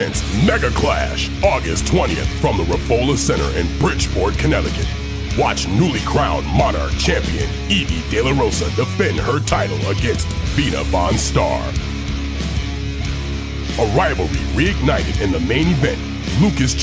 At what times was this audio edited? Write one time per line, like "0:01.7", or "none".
none